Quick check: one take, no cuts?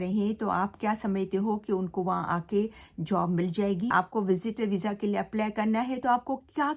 no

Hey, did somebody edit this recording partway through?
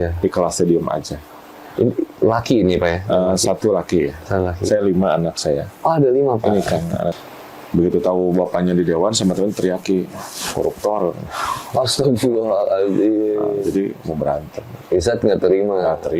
yes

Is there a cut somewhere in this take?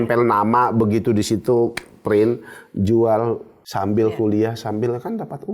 yes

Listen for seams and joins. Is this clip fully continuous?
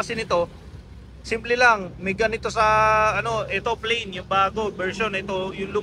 yes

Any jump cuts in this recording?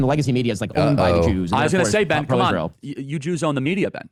no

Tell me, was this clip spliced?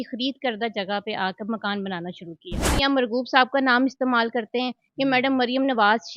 yes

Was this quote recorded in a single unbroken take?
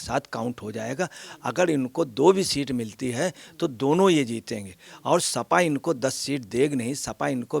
yes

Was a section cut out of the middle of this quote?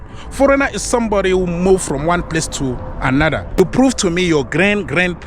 yes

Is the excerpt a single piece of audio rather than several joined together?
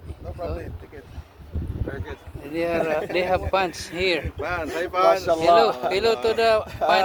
yes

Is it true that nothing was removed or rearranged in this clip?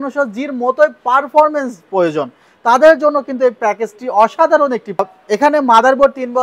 no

